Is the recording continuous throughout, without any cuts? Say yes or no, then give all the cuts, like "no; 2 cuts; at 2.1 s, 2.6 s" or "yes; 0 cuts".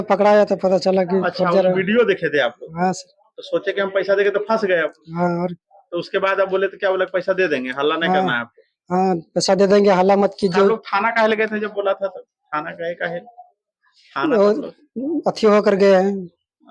yes; 0 cuts